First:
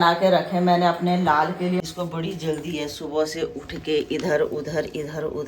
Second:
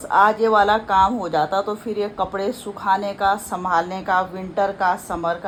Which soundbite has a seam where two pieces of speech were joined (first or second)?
first